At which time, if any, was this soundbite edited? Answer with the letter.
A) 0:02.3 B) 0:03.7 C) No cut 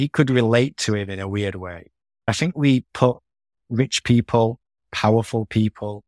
A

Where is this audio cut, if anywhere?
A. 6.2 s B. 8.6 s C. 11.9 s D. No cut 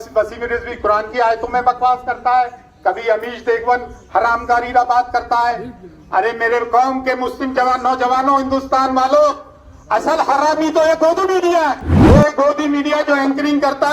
C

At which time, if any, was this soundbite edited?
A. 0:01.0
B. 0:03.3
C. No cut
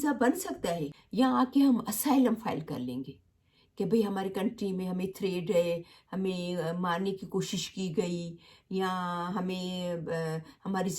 A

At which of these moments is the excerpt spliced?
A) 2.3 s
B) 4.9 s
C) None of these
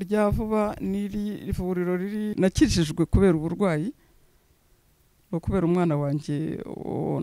A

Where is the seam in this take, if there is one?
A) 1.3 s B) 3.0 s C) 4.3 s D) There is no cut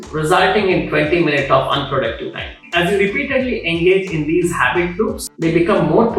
D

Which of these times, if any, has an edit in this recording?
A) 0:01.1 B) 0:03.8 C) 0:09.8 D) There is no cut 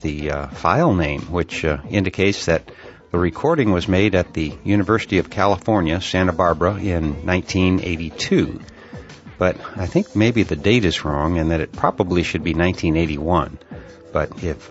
D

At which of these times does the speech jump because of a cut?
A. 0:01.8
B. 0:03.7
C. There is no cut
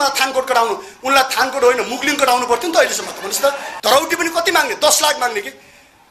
B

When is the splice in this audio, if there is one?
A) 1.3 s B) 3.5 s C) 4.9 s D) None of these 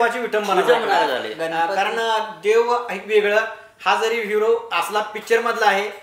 D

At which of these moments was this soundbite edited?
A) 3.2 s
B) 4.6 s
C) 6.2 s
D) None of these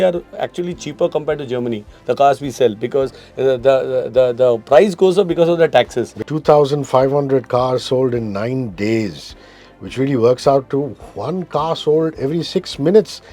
C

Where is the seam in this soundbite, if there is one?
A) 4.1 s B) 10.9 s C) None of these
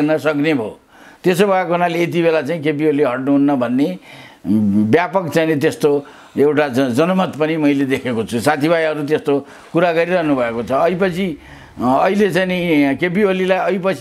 C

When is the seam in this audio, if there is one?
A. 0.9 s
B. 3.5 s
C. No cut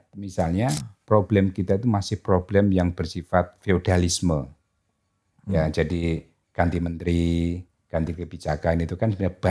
A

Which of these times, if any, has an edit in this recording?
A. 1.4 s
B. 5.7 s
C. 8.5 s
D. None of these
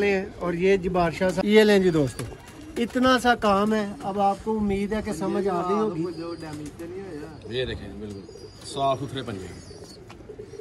A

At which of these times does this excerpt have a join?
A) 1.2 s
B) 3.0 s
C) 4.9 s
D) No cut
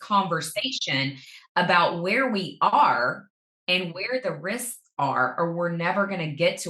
D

